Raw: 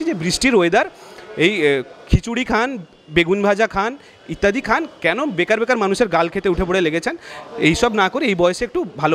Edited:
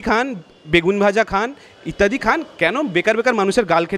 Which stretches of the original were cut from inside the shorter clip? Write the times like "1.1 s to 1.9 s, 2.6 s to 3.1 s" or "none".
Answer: none